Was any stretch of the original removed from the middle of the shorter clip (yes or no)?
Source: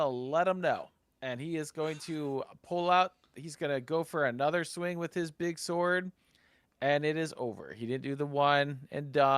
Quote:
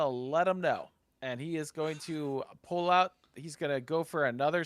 no